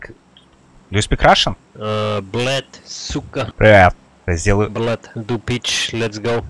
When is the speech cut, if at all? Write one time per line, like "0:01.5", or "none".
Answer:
0:01.7
0:03.5
0:04.1
0:05.1